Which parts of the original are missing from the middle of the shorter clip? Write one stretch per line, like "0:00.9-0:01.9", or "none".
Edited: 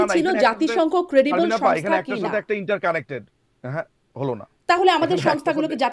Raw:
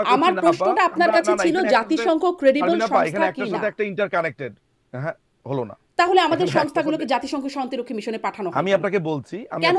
none